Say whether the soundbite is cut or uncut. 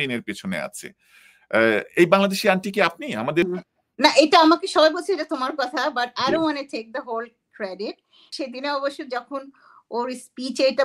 cut